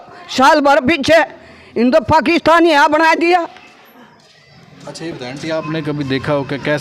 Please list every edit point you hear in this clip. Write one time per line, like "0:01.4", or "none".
none